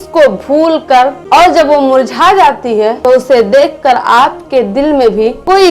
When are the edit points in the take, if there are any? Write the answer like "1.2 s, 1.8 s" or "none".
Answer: 1.2 s